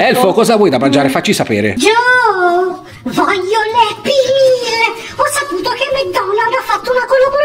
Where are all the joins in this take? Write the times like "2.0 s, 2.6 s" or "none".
none